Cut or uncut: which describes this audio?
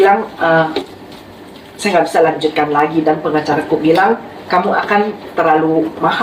uncut